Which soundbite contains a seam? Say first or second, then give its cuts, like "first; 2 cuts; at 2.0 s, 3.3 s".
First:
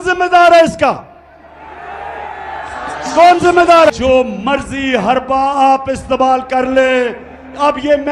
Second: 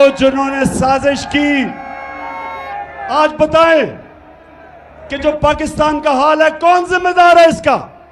first; 1 cut; at 3.9 s